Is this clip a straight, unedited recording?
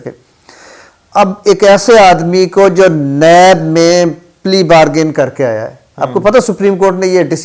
yes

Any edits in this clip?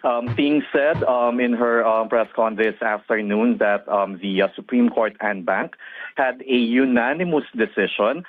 yes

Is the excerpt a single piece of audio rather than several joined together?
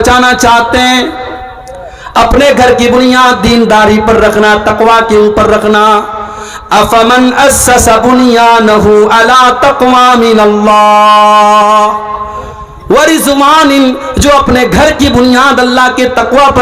yes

